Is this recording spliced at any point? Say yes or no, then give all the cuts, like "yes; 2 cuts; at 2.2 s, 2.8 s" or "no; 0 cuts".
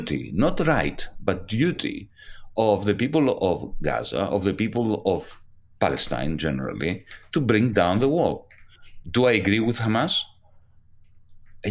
no; 0 cuts